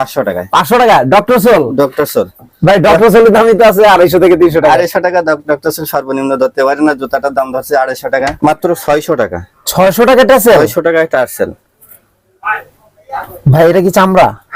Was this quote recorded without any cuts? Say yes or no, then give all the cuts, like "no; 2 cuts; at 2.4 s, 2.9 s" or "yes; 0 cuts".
no; 1 cut; at 8.3 s